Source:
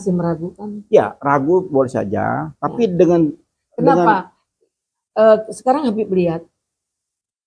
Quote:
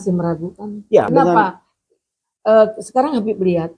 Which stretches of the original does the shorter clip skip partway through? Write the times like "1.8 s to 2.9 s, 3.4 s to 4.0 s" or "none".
1.1 s to 3.8 s